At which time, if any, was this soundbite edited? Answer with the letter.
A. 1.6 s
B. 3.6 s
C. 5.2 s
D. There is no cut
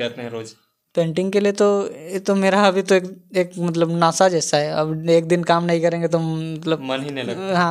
D